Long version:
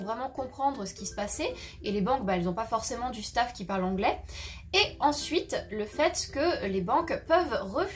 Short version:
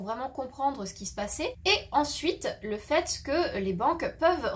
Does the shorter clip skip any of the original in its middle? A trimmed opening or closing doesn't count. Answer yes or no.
yes